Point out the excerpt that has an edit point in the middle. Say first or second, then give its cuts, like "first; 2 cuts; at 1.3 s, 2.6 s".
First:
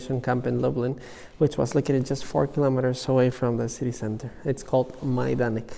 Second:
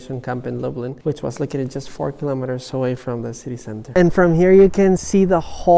second; 2 cuts; at 1.0 s, 3.9 s